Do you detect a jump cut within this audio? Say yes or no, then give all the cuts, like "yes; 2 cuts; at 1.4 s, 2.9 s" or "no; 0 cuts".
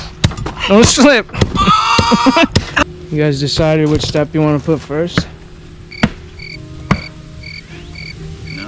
yes; 1 cut; at 2.8 s